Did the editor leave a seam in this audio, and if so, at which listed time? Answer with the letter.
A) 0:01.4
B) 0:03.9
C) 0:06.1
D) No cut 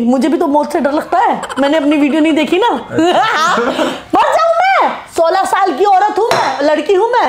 D